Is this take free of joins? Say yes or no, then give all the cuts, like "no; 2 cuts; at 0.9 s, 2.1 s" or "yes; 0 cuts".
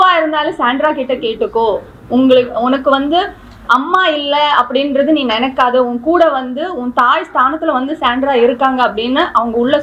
yes; 0 cuts